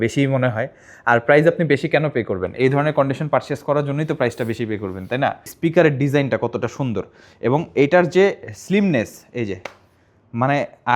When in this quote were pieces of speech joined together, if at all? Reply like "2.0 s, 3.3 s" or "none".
5.5 s